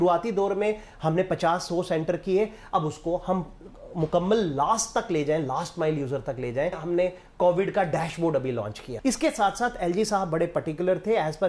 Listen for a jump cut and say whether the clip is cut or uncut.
cut